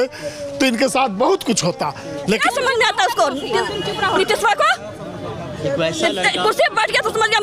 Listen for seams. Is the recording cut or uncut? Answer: cut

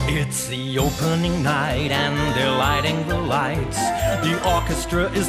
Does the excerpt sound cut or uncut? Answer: uncut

